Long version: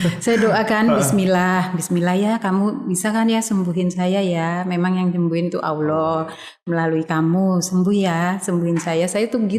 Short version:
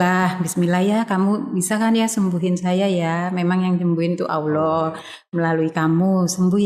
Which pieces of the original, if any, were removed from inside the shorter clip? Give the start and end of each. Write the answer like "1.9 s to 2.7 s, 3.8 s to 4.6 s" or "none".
none

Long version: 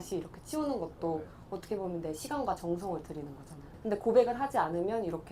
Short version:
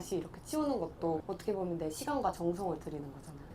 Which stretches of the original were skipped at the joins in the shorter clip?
1.3 s to 1.5 s

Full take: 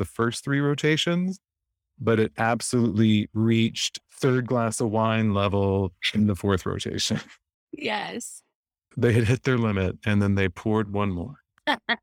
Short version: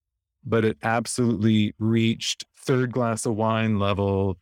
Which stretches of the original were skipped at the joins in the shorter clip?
none

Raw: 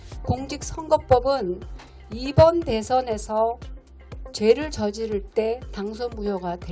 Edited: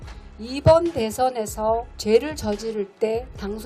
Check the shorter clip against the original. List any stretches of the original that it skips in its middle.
3.6 s to 4.3 s

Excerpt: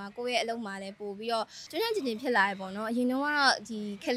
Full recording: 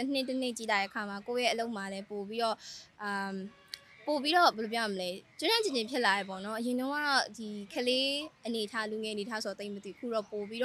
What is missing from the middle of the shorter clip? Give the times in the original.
2.7 s to 5.3 s

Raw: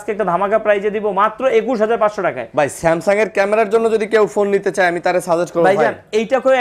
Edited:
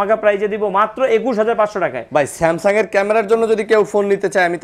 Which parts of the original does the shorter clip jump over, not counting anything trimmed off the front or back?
none

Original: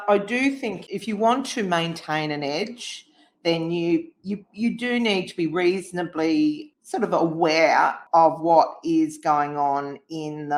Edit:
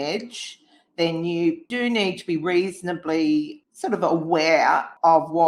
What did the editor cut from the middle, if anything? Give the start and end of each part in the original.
4.2 s to 4.8 s

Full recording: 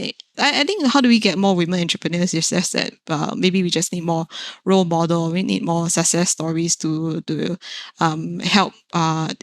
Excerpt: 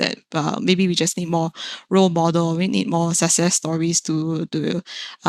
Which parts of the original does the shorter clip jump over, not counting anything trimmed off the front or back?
none

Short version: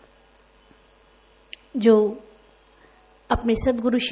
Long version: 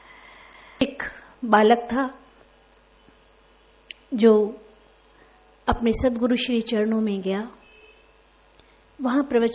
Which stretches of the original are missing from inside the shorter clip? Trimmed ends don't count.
none

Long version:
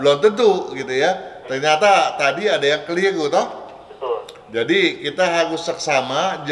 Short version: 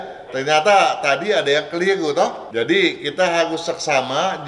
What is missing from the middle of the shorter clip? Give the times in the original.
3.6 s to 4.4 s

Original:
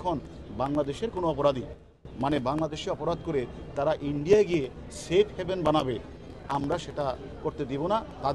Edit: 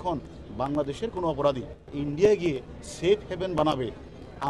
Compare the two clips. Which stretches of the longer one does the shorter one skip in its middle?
1.9 s to 4.0 s

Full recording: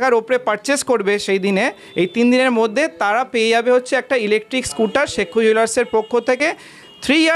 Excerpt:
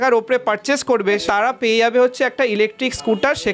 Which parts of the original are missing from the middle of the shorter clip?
1.2 s to 2.9 s

